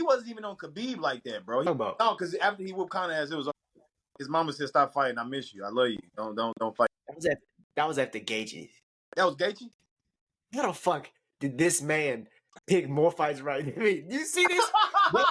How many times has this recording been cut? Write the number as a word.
one